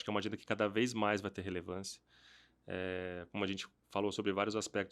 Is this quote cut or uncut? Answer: uncut